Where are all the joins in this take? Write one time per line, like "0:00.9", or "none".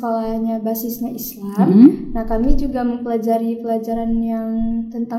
none